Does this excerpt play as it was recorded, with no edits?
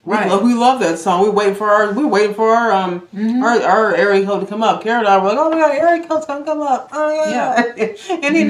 yes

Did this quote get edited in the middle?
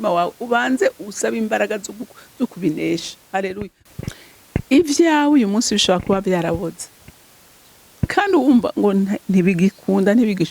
yes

